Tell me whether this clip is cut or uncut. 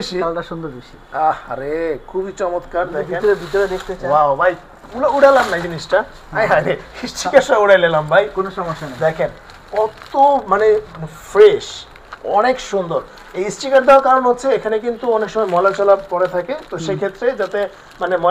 uncut